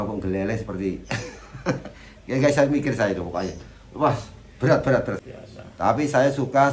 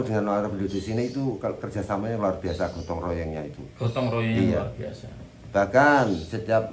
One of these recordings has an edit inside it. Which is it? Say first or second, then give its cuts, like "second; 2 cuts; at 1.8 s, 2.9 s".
first; 1 cut; at 5.2 s